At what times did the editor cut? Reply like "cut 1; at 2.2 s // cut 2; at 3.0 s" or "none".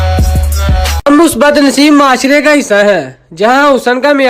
cut 1; at 1.0 s